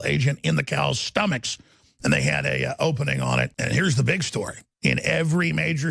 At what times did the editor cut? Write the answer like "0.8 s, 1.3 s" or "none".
3.6 s